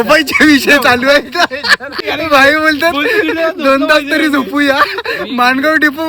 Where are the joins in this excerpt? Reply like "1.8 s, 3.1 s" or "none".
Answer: 2.0 s

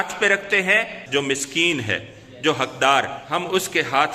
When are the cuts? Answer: 1.0 s, 3.2 s

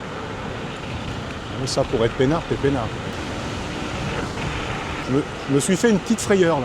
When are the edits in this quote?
3.1 s, 5.0 s

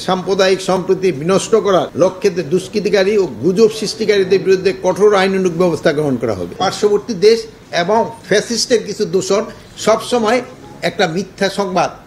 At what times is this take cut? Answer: 1.9 s, 6.6 s

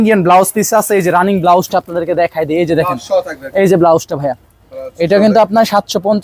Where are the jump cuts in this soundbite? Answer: none

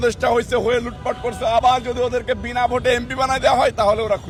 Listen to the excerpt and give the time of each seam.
none

